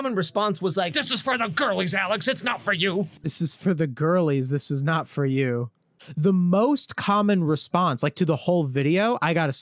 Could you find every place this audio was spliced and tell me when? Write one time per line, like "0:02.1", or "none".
0:03.2
0:05.8